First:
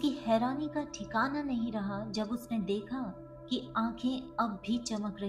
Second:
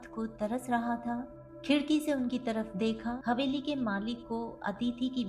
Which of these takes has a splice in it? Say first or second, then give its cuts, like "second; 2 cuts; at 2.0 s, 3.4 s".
second; 1 cut; at 3.2 s